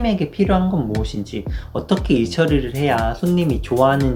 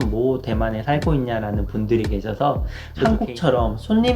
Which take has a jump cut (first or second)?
second